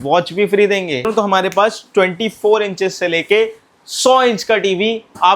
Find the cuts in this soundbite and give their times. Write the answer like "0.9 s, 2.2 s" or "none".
1.1 s